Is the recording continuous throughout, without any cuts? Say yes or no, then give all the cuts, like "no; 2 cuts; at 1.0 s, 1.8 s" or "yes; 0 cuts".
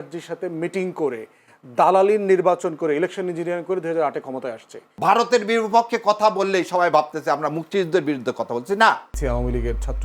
no; 2 cuts; at 4.8 s, 9.1 s